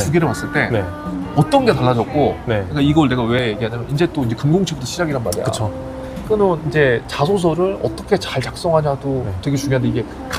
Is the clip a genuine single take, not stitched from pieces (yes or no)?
yes